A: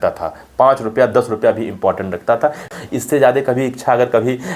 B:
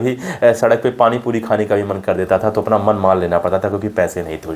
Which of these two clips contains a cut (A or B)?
A